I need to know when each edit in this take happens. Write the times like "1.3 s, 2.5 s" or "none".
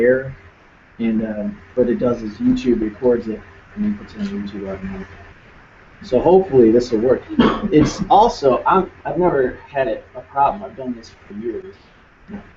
6.9 s